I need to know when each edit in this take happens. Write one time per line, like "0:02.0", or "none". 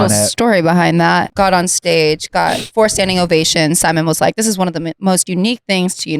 0:01.3